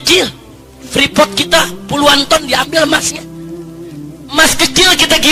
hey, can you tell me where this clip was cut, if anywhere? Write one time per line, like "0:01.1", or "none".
none